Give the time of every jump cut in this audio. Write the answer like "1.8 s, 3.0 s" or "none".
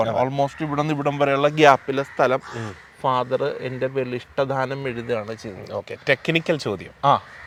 none